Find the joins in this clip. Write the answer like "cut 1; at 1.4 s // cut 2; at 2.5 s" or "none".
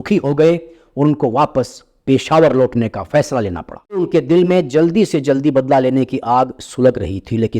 cut 1; at 3.9 s